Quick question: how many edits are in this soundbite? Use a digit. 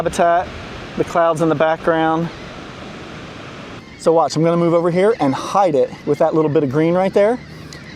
1